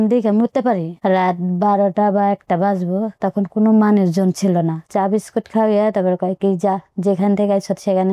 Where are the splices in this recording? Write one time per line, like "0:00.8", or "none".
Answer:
0:00.9
0:04.9